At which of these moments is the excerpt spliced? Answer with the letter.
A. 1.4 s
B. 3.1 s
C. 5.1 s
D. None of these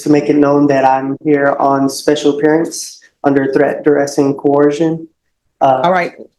D